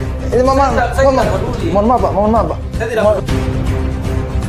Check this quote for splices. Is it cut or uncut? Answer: cut